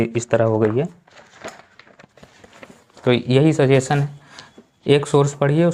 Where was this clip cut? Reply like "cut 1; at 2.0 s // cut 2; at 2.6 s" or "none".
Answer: none